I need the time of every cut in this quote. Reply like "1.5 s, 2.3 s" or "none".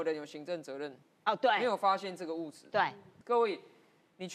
3.1 s